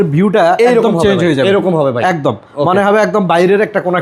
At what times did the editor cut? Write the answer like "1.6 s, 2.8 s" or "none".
none